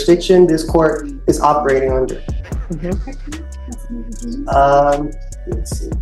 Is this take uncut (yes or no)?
yes